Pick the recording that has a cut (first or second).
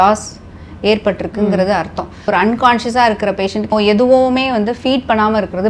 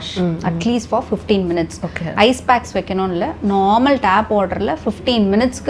first